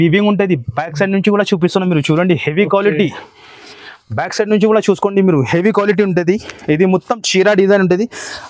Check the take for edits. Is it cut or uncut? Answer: uncut